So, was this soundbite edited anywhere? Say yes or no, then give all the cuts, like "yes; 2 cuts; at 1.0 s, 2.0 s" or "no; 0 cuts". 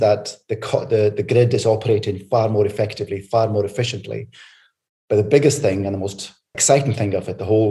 yes; 1 cut; at 6.6 s